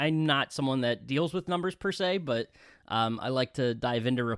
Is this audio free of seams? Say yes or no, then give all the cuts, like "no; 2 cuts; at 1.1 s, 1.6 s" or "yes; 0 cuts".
yes; 0 cuts